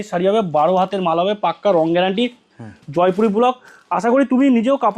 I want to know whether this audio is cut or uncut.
uncut